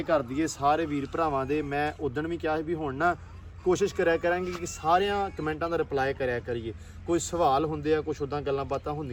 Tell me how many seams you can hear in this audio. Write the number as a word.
zero